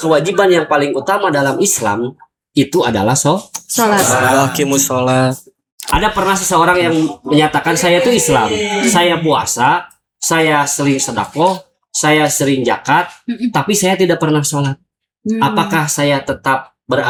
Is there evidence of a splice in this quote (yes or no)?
no